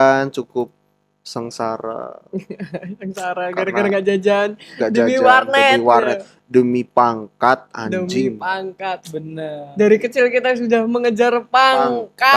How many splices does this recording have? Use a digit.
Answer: 0